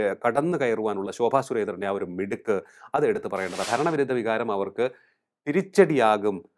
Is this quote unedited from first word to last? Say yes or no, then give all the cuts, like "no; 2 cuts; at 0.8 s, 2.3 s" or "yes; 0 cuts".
no; 1 cut; at 3.6 s